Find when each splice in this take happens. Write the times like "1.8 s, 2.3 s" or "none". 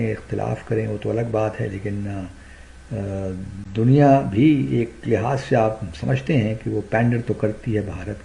none